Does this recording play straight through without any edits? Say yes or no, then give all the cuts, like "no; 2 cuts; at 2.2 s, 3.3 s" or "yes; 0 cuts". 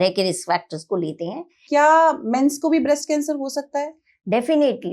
no; 1 cut; at 1.6 s